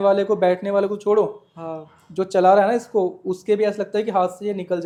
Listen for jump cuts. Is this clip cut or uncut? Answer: uncut